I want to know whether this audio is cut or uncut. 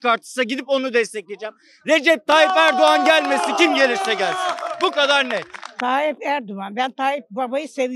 cut